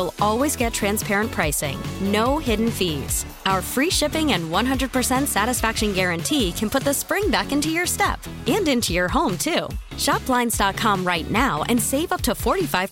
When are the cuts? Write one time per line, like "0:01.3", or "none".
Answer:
none

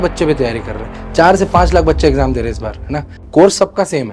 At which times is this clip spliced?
0:03.2

